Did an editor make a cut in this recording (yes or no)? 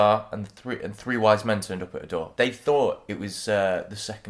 yes